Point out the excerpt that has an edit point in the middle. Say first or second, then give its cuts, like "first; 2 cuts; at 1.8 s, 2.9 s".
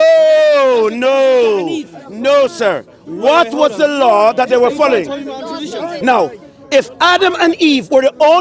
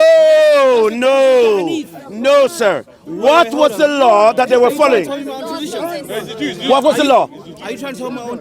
first; 1 cut; at 5.9 s